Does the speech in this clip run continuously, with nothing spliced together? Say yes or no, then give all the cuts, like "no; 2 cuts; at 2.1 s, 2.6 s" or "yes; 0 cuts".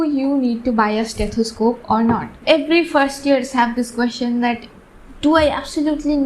no; 1 cut; at 2.4 s